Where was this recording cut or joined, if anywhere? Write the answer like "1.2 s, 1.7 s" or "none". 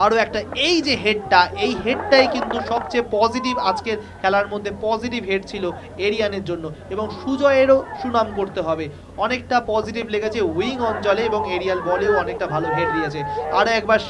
none

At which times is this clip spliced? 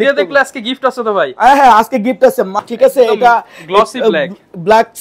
2.6 s

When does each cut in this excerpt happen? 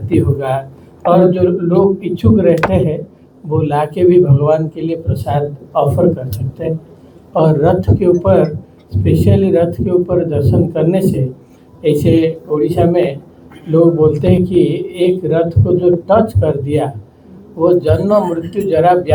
none

